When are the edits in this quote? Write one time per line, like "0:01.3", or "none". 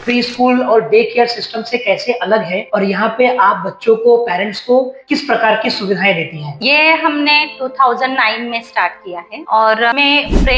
0:06.5